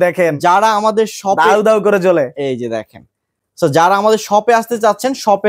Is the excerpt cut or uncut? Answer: uncut